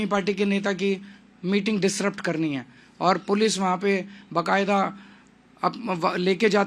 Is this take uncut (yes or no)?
yes